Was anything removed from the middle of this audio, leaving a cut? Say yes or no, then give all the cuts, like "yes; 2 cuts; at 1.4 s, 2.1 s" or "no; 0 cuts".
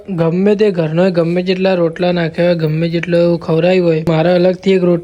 yes; 1 cut; at 4.1 s